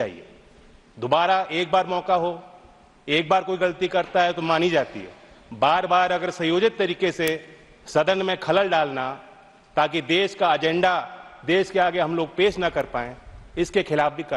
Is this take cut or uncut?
uncut